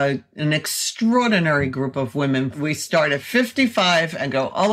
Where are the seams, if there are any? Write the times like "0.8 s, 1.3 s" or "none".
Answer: 2.5 s